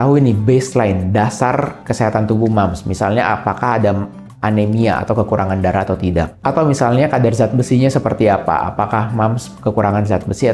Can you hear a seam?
no; 0 cuts

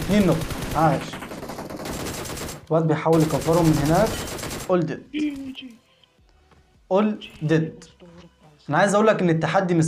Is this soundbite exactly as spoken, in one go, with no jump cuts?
yes; 0 cuts

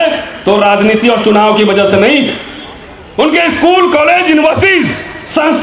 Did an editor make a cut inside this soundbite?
no; 0 cuts

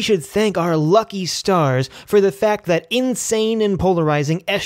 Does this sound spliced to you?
no; 0 cuts

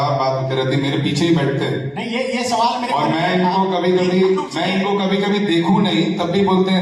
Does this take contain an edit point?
no; 0 cuts

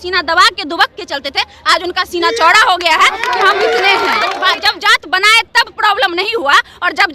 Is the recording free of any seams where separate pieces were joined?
no; 1 cut; at 4.3 s

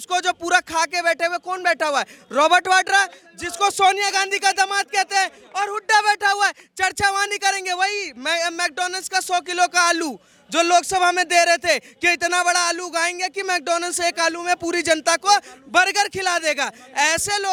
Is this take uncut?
yes; 0 cuts

